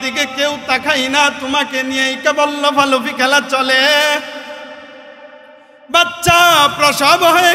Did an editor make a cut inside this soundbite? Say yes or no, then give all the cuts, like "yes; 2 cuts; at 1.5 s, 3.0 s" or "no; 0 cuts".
no; 0 cuts